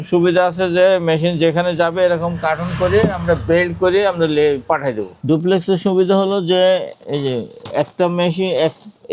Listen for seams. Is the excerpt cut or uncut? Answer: cut